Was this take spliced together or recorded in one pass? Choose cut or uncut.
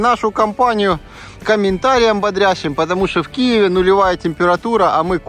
uncut